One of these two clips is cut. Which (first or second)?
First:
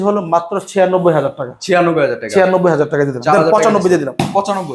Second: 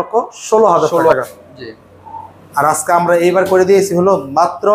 second